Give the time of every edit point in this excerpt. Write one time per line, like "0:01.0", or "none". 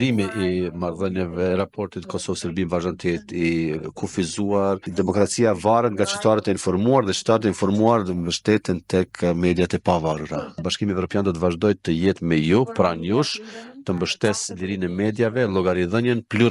0:04.9
0:10.6